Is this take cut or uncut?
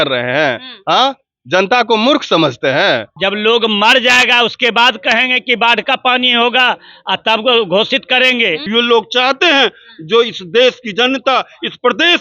cut